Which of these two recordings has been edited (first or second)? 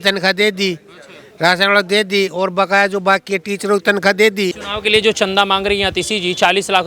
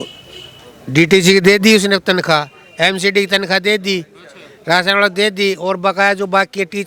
first